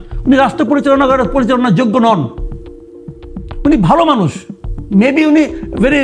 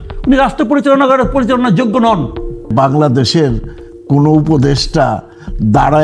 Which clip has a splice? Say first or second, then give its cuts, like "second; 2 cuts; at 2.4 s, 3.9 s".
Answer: second; 1 cut; at 2.7 s